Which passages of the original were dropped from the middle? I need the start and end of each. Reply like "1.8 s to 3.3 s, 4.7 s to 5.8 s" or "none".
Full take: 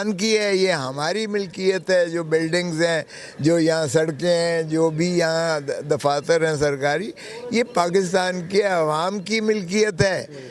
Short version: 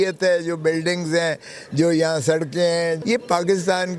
4.7 s to 7.4 s